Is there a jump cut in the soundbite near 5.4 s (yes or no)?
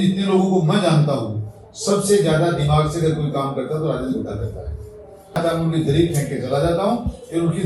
yes